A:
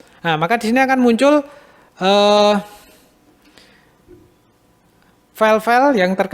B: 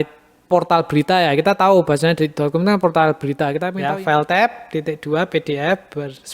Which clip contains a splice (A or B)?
B